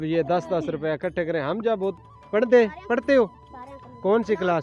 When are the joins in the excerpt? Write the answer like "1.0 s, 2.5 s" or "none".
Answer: 1.9 s